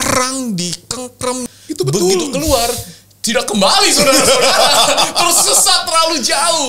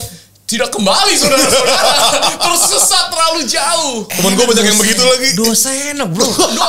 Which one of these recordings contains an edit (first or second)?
first